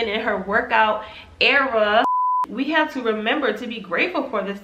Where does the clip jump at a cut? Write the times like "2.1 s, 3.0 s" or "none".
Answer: 2.2 s